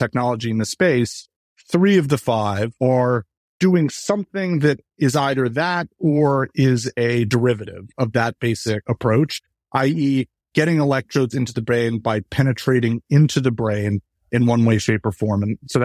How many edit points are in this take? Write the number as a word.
four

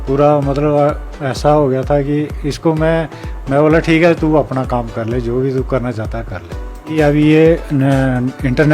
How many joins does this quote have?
one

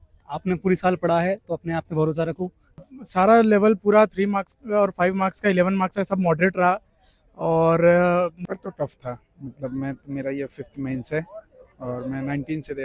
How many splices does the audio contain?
two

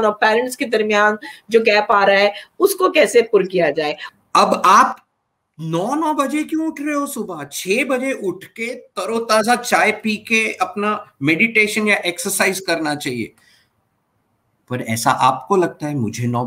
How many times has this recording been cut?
one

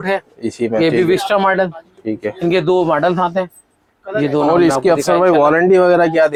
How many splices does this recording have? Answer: zero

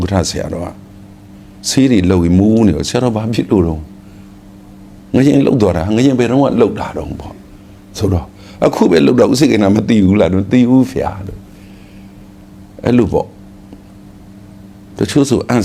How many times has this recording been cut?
zero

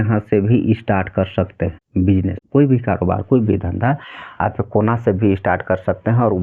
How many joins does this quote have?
one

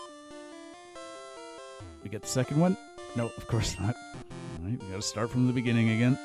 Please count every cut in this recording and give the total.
zero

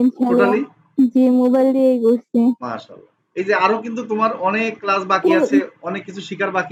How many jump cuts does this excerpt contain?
zero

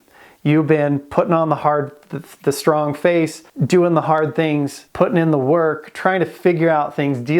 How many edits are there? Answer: two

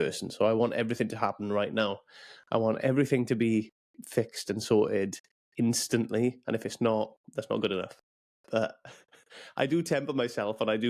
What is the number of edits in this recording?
zero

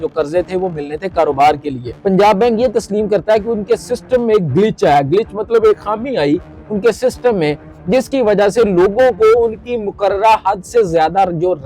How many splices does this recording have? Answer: one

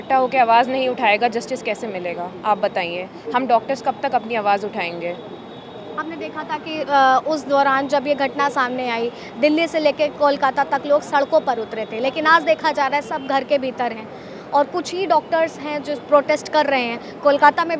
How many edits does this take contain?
zero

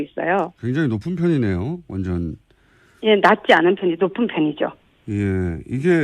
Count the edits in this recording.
one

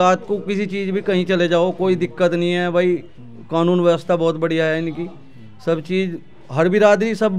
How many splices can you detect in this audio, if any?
zero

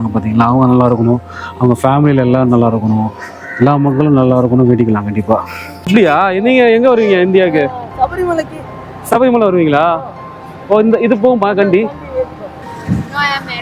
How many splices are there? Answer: two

